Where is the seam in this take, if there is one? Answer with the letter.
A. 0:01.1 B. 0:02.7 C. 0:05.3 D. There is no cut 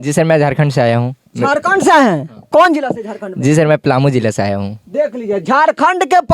D